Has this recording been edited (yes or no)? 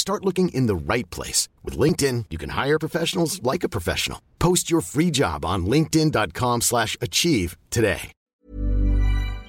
yes